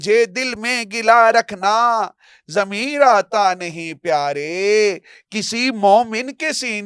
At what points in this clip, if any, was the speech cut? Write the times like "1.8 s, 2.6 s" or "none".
none